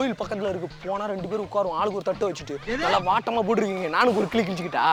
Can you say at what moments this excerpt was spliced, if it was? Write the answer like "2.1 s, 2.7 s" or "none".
none